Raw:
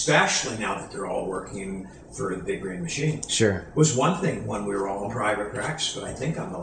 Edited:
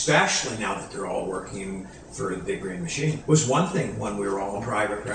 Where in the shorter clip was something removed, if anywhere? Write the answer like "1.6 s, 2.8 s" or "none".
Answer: 3.2 s